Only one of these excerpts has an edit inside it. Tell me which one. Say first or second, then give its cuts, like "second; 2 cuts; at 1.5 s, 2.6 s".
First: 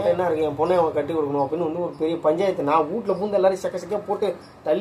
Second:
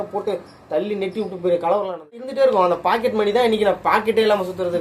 second; 1 cut; at 2.3 s